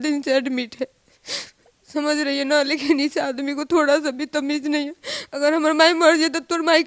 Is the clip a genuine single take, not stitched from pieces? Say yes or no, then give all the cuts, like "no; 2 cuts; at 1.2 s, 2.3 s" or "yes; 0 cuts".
yes; 0 cuts